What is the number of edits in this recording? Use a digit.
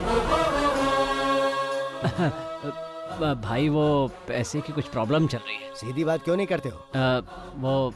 1